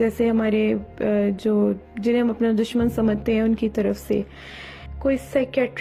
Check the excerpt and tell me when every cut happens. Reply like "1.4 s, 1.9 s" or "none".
4.7 s